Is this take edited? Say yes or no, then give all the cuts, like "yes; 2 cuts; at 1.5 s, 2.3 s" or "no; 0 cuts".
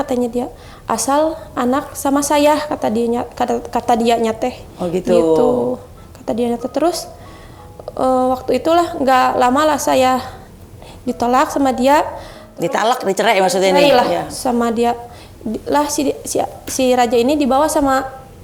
no; 0 cuts